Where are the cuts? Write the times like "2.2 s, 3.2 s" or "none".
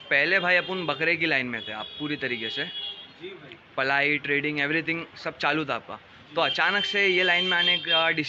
none